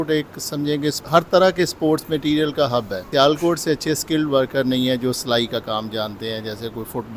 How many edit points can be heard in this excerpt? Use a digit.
2